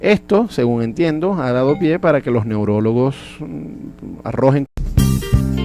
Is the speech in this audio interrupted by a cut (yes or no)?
no